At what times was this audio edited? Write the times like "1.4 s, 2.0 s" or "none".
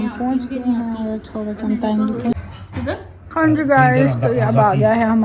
2.3 s